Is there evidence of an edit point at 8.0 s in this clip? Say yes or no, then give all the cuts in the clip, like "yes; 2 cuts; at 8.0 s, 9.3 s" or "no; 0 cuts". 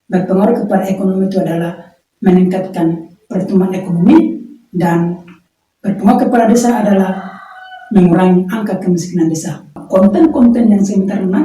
no; 1 cut; at 9.7 s